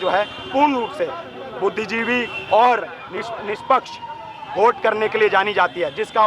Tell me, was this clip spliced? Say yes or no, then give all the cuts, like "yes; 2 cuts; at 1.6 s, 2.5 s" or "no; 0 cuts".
no; 0 cuts